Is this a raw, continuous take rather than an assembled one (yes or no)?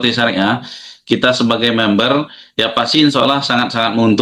yes